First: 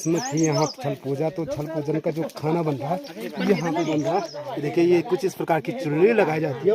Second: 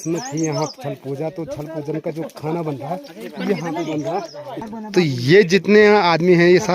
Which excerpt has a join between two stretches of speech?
second; 1 cut; at 4.7 s

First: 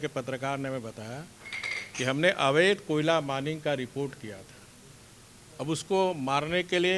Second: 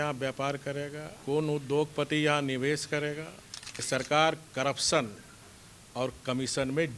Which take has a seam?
second; 2 cuts; at 1.1 s, 3.7 s

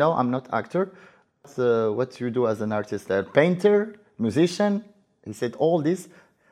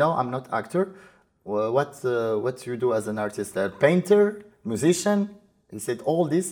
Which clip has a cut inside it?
first; 1 cut; at 1.5 s

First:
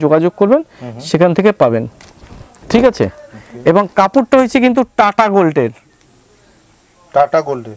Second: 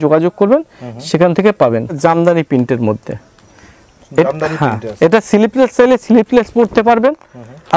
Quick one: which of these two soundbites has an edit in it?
second; 1 cut; at 1.9 s

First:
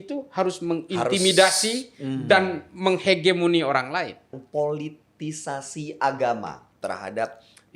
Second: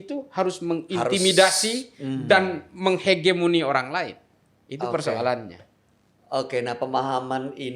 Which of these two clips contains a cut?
first; 1 cut; at 4.3 s

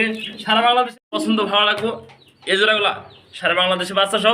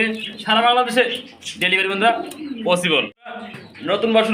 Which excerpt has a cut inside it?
first; 1 cut; at 1.0 s

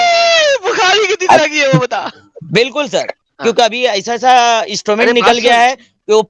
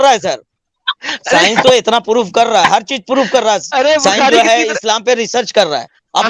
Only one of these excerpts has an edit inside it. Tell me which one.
first; 1 cut; at 3.2 s

